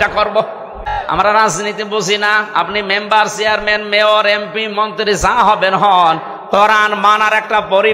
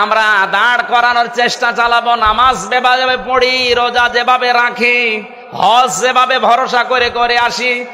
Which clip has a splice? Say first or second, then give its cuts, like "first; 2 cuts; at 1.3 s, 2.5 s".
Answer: first; 1 cut; at 1.0 s